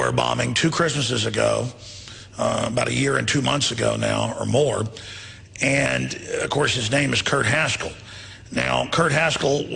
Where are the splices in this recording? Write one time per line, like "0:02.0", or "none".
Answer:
0:06.7